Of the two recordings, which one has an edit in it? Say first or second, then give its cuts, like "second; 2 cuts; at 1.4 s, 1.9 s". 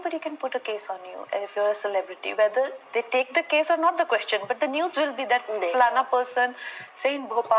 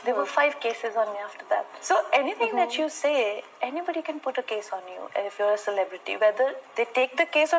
second; 1 cut; at 1.8 s